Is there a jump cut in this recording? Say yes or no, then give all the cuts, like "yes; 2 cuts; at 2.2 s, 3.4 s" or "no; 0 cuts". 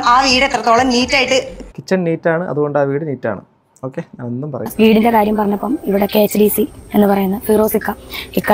yes; 1 cut; at 4.7 s